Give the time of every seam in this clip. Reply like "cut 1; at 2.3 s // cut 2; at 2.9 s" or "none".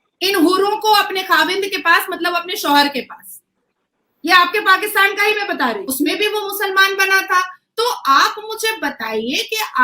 cut 1; at 5.9 s